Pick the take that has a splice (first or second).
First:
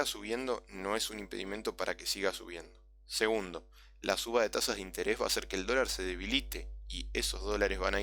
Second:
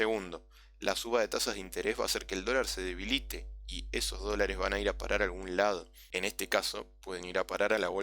second